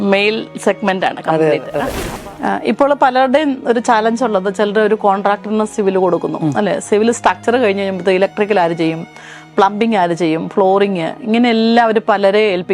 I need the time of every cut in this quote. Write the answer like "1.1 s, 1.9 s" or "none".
2.0 s